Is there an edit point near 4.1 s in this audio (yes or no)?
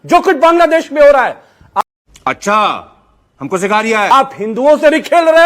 yes